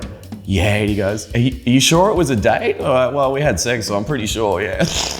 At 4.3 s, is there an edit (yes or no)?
no